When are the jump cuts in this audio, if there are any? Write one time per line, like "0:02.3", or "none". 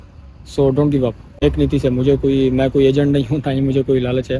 0:01.4